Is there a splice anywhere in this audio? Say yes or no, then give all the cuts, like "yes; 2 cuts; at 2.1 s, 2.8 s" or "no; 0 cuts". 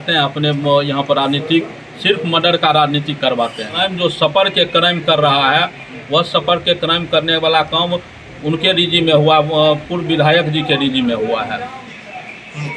yes; 1 cut; at 3.8 s